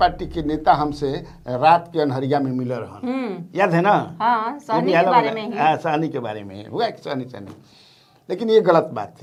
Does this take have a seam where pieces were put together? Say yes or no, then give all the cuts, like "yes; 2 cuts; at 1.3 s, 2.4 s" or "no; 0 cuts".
no; 0 cuts